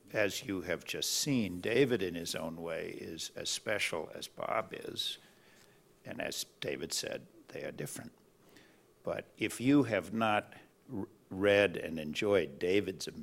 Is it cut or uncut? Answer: cut